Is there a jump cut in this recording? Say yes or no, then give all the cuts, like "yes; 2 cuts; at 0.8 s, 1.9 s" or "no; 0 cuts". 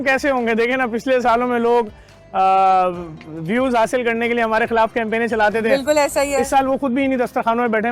no; 0 cuts